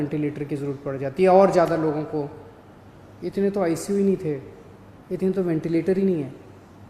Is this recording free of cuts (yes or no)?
yes